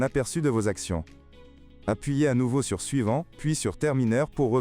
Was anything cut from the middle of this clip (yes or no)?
yes